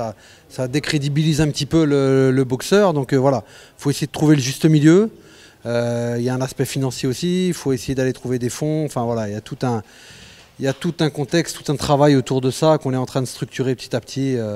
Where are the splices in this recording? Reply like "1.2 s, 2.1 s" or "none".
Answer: none

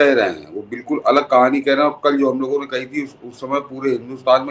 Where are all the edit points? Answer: none

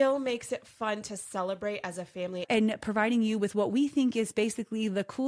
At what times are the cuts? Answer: 2.4 s

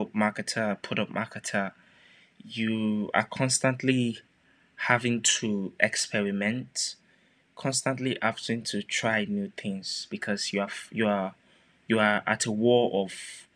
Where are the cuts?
none

